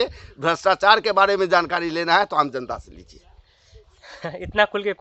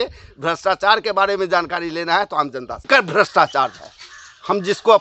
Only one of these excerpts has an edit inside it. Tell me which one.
second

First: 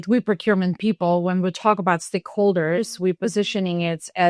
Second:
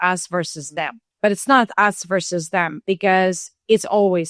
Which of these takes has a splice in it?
second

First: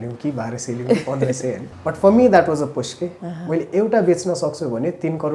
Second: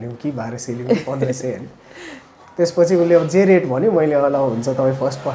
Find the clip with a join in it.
first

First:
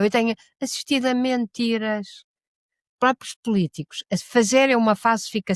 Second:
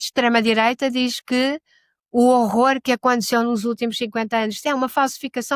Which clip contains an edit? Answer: first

